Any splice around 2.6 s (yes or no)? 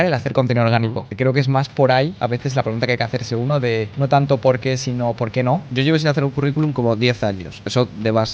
no